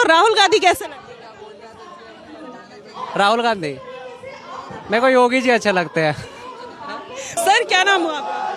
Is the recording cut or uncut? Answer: cut